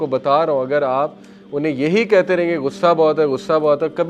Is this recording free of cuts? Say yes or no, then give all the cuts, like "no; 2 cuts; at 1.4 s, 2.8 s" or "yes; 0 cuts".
yes; 0 cuts